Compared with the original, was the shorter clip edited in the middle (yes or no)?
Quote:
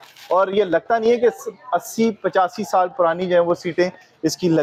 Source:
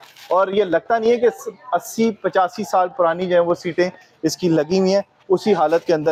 no